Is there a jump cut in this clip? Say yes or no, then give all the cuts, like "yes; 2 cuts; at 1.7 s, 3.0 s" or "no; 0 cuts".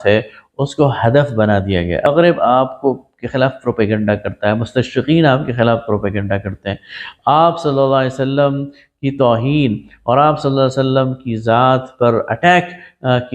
yes; 1 cut; at 2.1 s